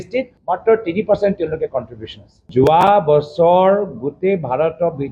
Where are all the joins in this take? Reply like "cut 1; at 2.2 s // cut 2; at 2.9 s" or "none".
cut 1; at 2.4 s